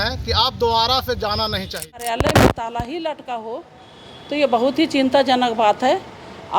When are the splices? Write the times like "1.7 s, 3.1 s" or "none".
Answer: 2.1 s